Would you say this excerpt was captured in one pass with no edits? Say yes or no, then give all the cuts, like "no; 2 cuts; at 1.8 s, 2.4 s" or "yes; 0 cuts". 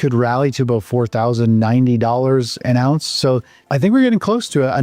no; 1 cut; at 3.6 s